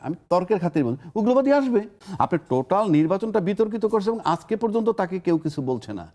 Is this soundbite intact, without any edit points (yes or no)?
no